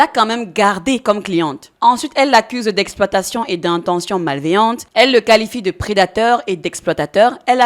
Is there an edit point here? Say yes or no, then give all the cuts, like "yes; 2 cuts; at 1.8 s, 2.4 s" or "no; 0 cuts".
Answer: yes; 1 cut; at 1.6 s